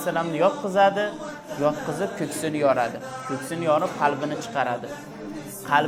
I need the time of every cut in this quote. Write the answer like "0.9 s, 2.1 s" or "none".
none